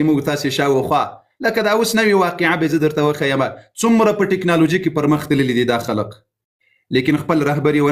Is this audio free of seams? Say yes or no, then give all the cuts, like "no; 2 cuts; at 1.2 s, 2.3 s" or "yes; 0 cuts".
yes; 0 cuts